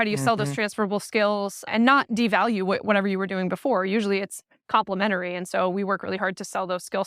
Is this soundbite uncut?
no; 1 cut; at 1.6 s

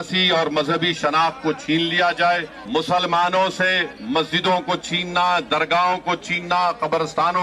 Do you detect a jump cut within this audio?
yes; 1 cut; at 2.5 s

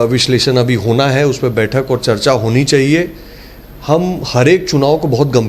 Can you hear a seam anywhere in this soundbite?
no; 0 cuts

